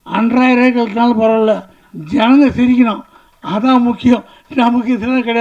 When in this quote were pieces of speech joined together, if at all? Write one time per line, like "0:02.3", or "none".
none